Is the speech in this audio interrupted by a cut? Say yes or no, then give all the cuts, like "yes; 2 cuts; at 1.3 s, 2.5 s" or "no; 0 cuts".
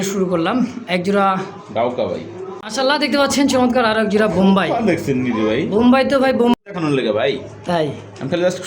yes; 2 cuts; at 2.5 s, 6.6 s